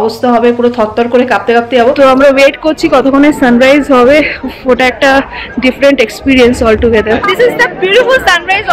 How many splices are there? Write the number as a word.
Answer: two